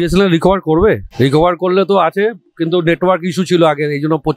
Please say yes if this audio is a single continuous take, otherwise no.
no